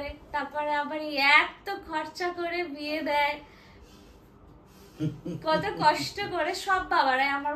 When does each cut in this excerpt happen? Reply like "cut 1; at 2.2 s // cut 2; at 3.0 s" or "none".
none